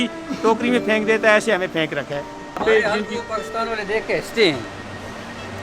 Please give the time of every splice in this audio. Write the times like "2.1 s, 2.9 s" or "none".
2.6 s